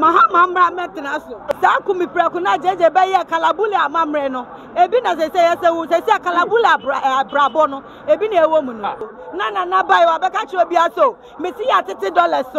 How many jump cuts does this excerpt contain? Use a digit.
2